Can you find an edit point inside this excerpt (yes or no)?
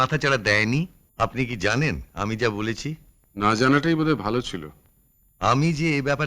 yes